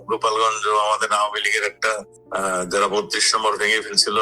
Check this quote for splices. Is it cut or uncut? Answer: cut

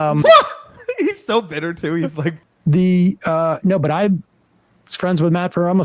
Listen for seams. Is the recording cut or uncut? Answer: cut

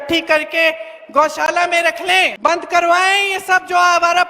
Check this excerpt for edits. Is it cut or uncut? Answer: cut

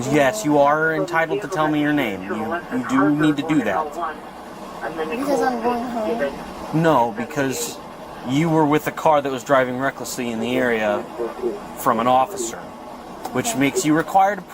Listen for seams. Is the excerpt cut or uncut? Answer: uncut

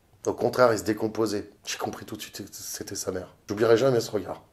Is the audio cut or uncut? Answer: cut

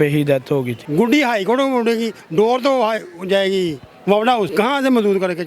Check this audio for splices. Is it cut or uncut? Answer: cut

